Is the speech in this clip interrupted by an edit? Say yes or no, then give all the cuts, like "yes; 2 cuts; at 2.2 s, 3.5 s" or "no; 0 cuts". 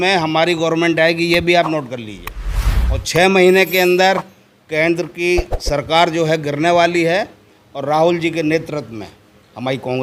no; 0 cuts